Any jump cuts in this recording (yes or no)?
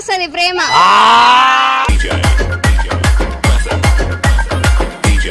no